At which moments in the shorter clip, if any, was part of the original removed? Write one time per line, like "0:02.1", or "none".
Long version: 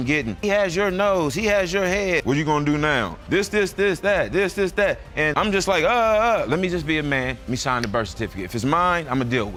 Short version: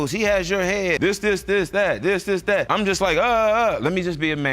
0:01.0
0:02.7